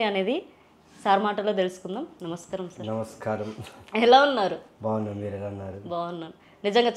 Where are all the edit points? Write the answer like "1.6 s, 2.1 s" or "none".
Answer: none

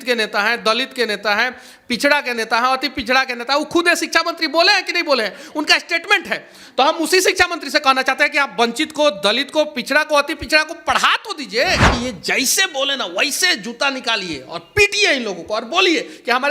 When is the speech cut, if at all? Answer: 11.9 s

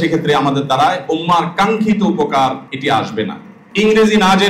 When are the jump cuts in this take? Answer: 2.7 s, 3.6 s

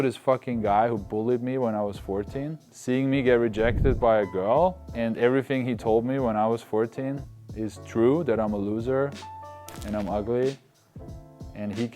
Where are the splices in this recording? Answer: 2.7 s, 4.8 s

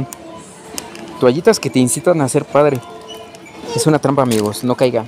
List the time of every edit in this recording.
none

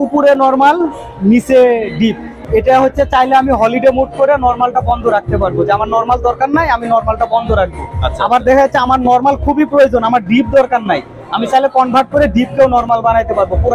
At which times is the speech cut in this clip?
2.3 s

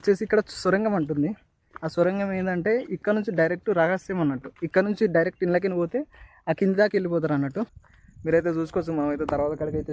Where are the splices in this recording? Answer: 7.9 s

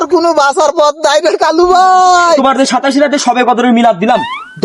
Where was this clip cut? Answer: 2.4 s

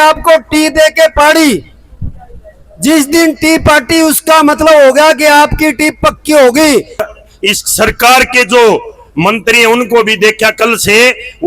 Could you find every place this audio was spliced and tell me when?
7.1 s

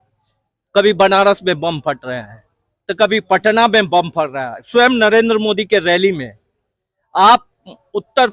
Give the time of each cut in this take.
none

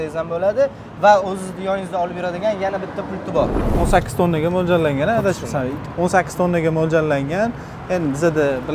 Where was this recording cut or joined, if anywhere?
3.6 s

